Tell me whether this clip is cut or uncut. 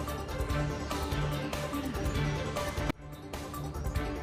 uncut